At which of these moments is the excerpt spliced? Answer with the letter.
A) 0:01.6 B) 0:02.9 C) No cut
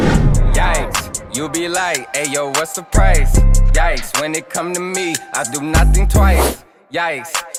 C